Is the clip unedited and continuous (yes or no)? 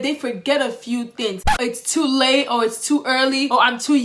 no